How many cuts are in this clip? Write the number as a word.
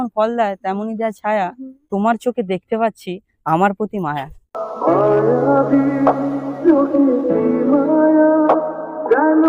zero